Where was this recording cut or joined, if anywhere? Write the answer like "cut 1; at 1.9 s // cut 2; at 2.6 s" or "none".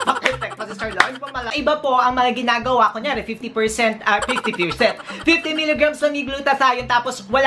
cut 1; at 1.5 s